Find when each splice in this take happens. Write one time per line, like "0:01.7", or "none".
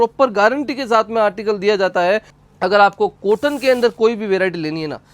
0:02.3